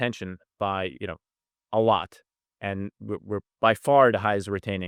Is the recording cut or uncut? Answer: uncut